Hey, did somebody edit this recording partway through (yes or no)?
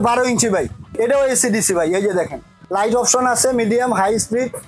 yes